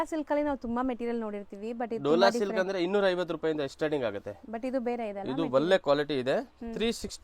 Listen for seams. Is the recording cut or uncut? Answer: uncut